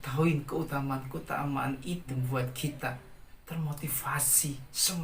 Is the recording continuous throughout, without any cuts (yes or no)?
no